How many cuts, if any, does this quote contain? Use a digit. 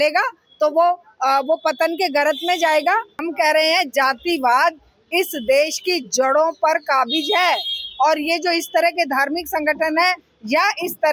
1